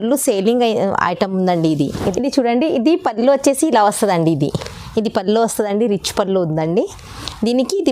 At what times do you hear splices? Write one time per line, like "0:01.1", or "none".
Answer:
0:02.1